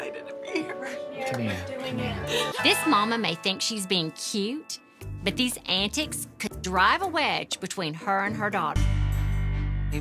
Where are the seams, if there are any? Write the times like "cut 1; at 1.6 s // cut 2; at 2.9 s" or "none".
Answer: cut 1; at 2.5 s // cut 2; at 8.8 s